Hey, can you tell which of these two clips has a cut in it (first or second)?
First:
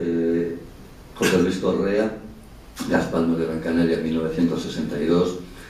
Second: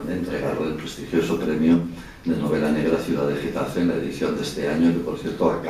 second